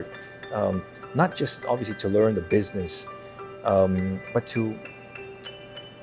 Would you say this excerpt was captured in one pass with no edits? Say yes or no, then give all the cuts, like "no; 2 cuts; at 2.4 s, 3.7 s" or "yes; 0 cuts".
yes; 0 cuts